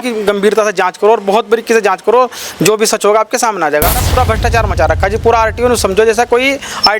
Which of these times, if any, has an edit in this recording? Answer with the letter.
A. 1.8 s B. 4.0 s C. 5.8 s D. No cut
B